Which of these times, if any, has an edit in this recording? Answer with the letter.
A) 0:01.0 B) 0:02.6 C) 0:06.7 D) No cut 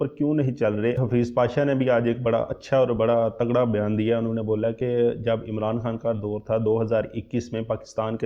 A